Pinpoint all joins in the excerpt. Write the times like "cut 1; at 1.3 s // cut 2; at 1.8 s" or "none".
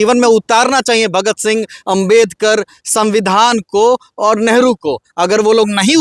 none